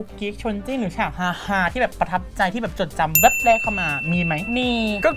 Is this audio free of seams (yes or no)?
yes